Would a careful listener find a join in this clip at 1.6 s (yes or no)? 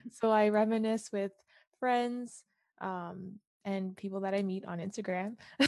no